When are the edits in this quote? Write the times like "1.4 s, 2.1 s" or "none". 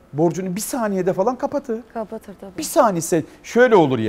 none